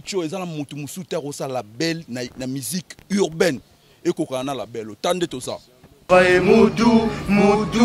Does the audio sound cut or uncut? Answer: cut